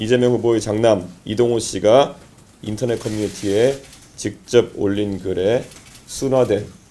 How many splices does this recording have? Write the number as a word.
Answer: zero